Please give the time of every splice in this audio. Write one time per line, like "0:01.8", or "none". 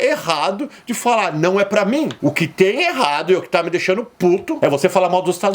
0:04.5